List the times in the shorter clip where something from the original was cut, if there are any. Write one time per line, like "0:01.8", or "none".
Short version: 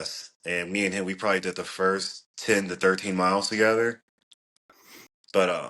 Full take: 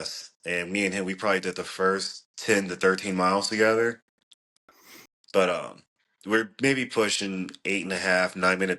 none